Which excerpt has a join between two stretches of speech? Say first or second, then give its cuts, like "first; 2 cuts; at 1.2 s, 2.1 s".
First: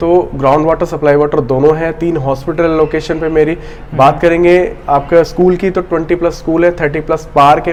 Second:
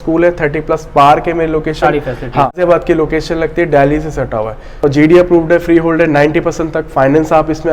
second; 2 cuts; at 2.5 s, 4.8 s